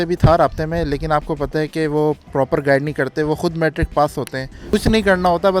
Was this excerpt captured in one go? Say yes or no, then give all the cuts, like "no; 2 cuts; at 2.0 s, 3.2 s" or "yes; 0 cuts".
no; 1 cut; at 4.6 s